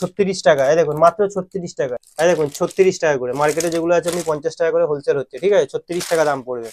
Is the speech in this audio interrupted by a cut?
no; 0 cuts

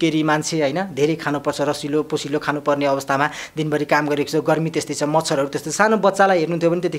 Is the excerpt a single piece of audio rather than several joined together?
yes; 0 cuts

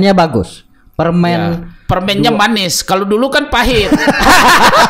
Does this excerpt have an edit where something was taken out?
no; 0 cuts

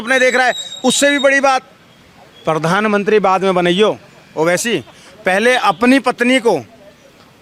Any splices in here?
no; 0 cuts

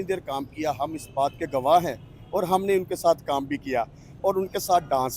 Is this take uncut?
yes; 0 cuts

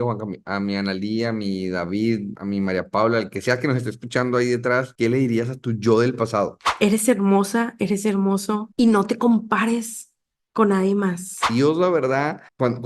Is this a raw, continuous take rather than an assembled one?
no; 4 cuts; at 2.3 s, 4.9 s, 6.7 s, 11.5 s

